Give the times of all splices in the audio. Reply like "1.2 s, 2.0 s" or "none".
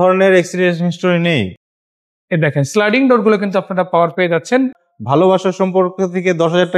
1.6 s, 4.9 s